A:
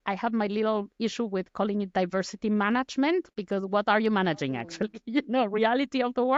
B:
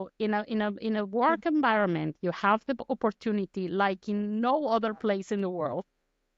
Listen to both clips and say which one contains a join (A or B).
A